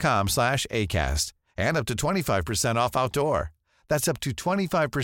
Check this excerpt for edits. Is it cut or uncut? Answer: uncut